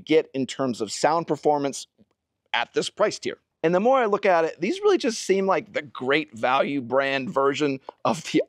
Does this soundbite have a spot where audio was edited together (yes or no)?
no